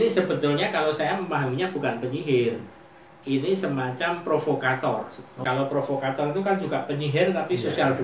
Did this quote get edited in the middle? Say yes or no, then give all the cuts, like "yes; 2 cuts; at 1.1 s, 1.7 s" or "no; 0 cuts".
yes; 1 cut; at 5.4 s